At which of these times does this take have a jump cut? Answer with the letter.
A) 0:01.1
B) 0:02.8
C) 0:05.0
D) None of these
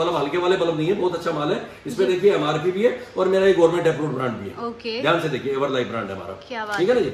D